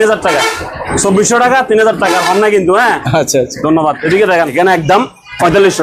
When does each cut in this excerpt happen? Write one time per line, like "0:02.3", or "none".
0:04.5